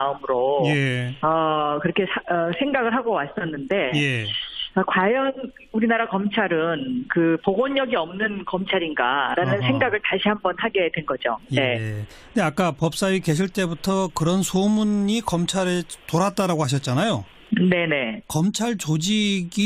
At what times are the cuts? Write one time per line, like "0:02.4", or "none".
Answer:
0:02.3

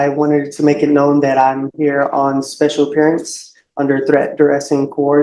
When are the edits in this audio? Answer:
none

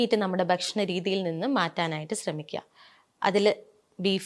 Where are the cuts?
none

